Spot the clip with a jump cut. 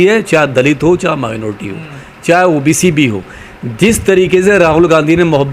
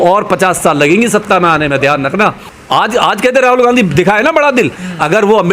second; 1 cut; at 2.5 s

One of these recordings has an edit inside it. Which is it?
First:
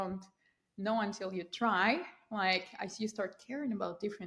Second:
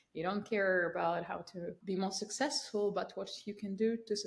second; 1 cut; at 1.8 s

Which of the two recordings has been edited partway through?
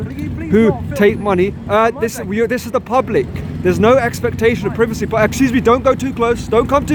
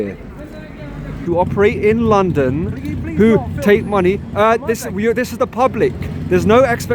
second; 1 cut; at 1.2 s

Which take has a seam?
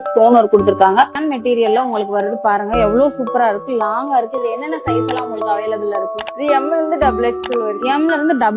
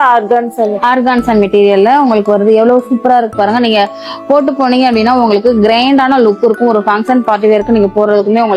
first; 1 cut; at 1.2 s

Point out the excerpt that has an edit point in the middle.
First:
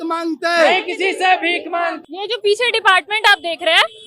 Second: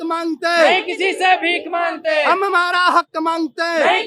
first; 1 cut; at 2.0 s

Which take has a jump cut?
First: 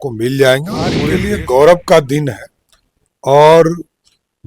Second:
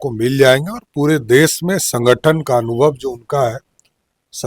first; 1 cut; at 1.1 s

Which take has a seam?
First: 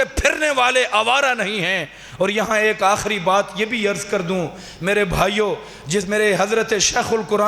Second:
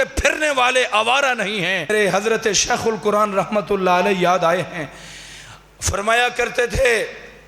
second; 1 cut; at 1.9 s

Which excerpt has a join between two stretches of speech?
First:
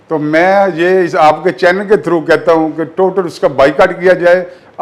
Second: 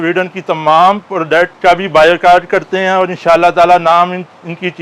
second; 1 cut; at 1.5 s

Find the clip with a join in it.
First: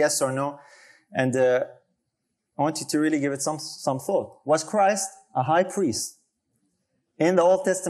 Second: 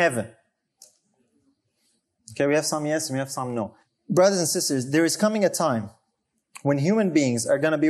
second; 1 cut; at 3.8 s

